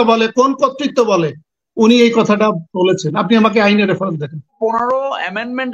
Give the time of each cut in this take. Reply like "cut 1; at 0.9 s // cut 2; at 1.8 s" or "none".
cut 1; at 4.5 s